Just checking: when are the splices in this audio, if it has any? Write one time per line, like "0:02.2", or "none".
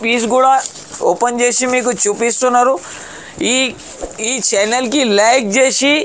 none